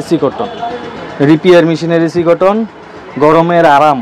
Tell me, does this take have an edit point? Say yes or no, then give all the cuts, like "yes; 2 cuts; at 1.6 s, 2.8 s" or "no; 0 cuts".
no; 0 cuts